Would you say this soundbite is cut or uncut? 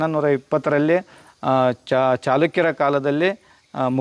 uncut